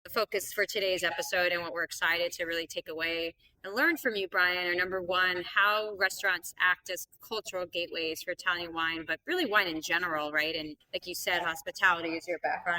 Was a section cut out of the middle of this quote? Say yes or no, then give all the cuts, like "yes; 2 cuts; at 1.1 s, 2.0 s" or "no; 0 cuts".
no; 0 cuts